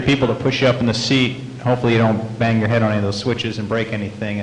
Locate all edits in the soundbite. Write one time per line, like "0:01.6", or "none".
none